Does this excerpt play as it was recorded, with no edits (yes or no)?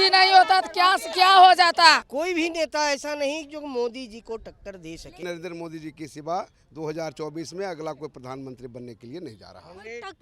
no